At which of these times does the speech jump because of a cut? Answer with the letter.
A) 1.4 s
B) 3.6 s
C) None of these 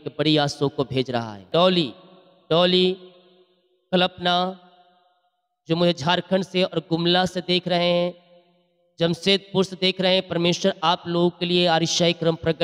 A